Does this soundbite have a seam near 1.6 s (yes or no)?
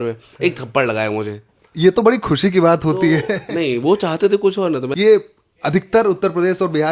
no